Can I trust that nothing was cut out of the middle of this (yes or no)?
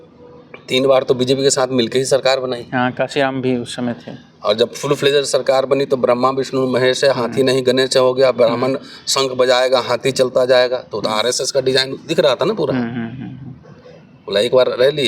yes